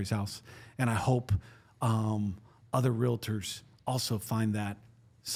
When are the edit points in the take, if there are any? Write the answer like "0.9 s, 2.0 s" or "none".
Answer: none